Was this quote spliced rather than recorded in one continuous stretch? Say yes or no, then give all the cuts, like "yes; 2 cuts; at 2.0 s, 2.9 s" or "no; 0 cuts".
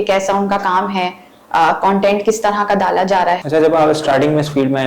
yes; 1 cut; at 3.4 s